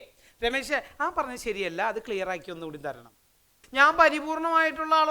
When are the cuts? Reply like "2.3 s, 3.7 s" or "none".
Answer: 3.6 s

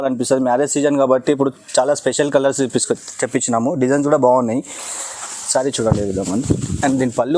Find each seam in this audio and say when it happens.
none

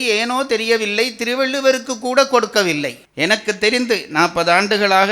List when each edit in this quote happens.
3.0 s

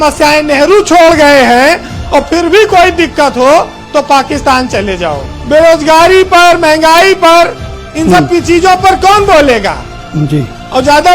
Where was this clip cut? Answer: 5.3 s

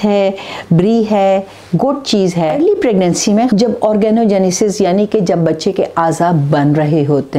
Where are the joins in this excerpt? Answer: 2.5 s, 3.5 s

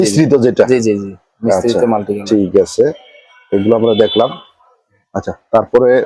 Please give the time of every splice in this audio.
none

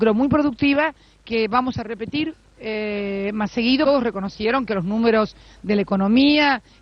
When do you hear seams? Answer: none

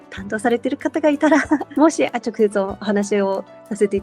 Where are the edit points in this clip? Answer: 1.7 s

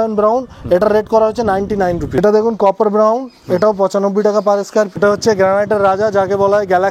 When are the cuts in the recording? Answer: 2.2 s, 5.0 s

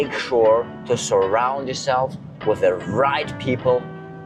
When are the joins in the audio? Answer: none

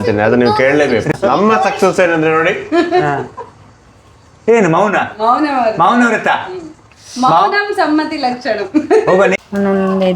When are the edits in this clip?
1.1 s, 9.4 s

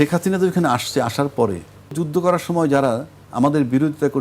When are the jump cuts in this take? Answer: 1.9 s

